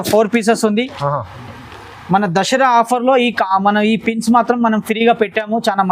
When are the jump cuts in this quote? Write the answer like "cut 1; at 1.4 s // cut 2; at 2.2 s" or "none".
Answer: none